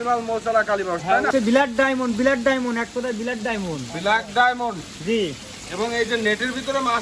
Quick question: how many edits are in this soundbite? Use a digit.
1